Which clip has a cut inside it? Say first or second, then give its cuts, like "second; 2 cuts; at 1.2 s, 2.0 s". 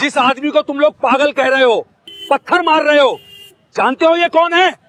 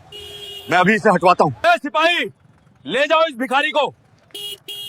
second; 1 cut; at 1.6 s